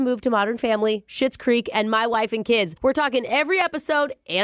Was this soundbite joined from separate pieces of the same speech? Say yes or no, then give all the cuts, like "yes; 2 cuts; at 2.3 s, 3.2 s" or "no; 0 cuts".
no; 0 cuts